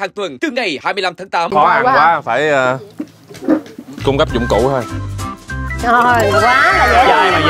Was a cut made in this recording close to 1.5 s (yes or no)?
yes